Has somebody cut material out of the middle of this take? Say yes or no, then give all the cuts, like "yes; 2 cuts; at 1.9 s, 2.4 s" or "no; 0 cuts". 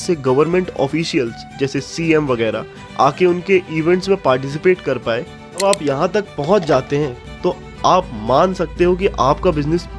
yes; 1 cut; at 5.6 s